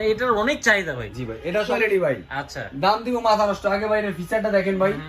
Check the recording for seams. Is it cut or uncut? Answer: cut